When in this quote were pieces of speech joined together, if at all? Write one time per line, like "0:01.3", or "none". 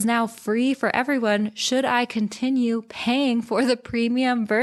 none